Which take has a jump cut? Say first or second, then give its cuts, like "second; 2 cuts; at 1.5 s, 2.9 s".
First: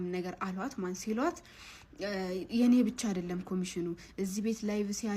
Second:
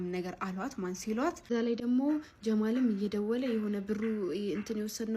second; 1 cut; at 1.5 s